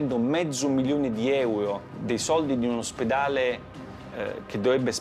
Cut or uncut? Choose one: cut